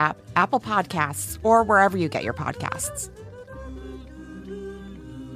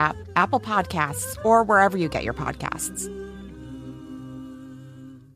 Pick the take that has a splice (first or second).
second